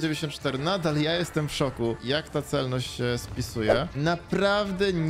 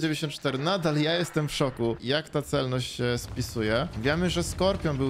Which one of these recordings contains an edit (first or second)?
first